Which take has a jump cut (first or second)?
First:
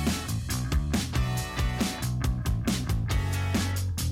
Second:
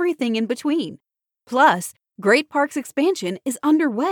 first